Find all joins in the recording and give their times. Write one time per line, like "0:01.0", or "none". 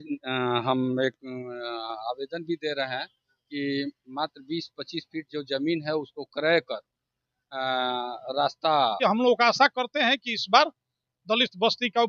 0:09.2